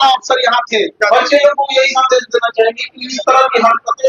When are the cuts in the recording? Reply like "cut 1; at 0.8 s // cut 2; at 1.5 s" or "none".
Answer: cut 1; at 1.0 s

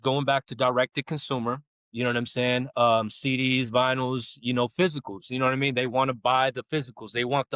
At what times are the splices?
none

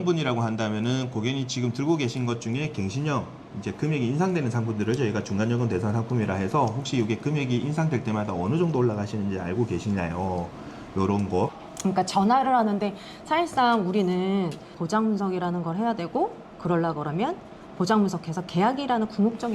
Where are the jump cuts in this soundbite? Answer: cut 1; at 11.7 s // cut 2; at 14.7 s

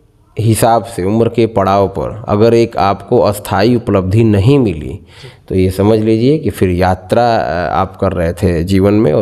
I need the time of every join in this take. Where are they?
none

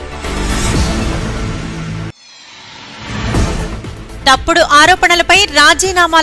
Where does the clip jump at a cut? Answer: cut 1; at 2.1 s // cut 2; at 3.7 s

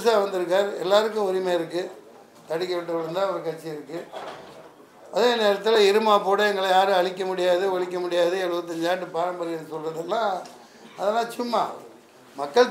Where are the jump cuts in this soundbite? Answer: none

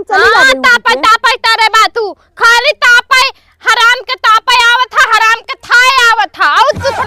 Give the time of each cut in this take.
none

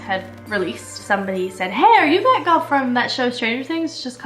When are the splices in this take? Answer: cut 1; at 1.0 s

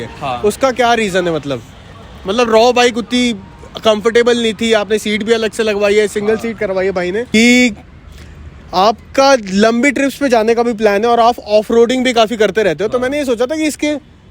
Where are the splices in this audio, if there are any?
cut 1; at 7.3 s

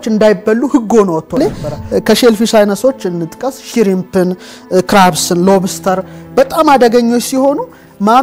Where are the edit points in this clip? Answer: cut 1; at 1.4 s

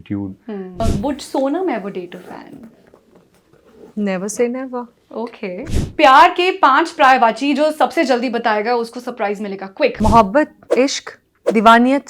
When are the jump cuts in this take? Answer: cut 1; at 0.8 s // cut 2; at 5.6 s // cut 3; at 10.0 s

